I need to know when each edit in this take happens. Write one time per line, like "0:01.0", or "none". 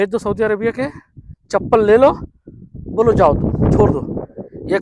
none